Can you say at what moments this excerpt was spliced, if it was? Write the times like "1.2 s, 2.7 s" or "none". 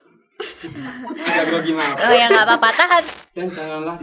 3.1 s